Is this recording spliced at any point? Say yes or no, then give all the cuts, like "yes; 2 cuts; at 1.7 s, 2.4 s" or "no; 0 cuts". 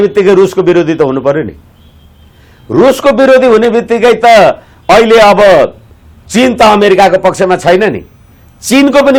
no; 0 cuts